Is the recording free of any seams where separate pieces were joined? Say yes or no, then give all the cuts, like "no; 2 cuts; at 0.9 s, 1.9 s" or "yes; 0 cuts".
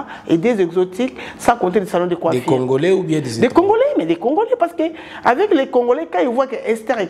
yes; 0 cuts